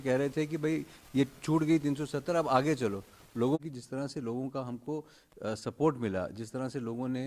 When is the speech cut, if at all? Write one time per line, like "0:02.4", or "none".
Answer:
0:03.6